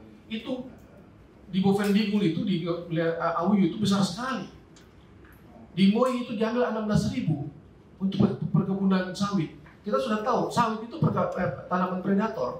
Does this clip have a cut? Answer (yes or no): no